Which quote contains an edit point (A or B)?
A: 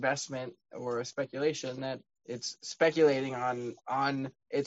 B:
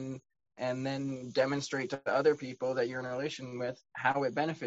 A